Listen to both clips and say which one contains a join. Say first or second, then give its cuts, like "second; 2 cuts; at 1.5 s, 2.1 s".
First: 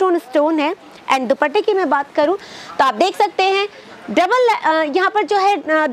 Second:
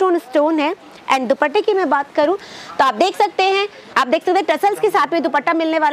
second; 1 cut; at 3.8 s